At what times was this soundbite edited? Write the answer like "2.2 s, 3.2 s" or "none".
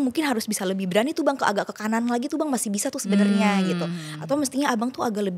none